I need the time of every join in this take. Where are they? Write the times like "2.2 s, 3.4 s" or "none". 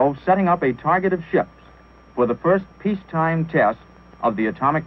1.5 s